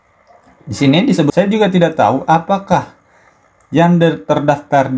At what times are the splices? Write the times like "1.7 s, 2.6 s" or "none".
1.2 s